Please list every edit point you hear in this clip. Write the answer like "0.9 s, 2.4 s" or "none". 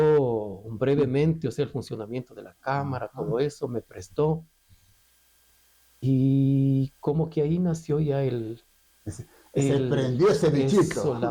none